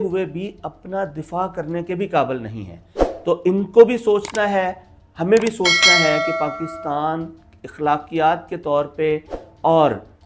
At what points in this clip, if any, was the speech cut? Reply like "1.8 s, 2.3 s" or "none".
none

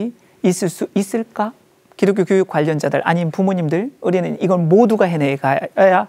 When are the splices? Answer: 1.6 s

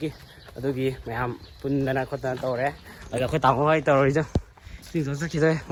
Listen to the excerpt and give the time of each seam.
none

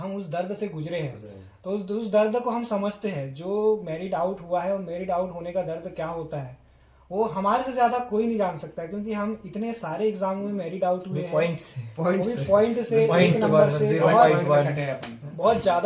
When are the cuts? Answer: none

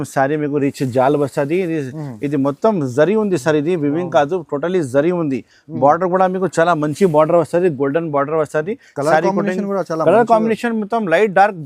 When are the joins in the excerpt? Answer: none

